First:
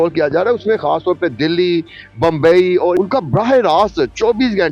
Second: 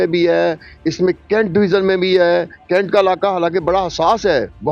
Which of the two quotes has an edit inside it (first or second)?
first